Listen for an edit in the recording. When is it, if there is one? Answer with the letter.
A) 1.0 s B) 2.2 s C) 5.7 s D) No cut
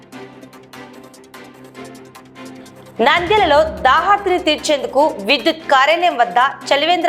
B